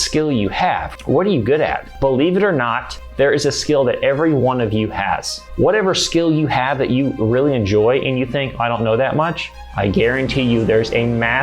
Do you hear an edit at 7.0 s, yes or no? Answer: no